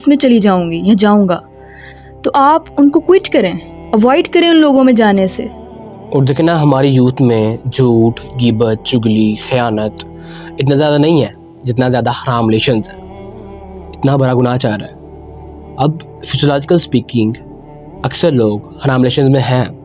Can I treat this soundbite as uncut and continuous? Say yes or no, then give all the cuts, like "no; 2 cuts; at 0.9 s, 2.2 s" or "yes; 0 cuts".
yes; 0 cuts